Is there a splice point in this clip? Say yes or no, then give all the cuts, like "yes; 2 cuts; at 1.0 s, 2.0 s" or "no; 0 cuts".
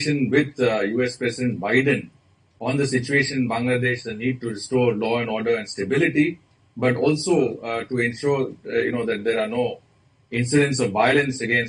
no; 0 cuts